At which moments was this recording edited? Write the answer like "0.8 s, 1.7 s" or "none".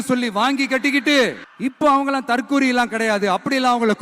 1.5 s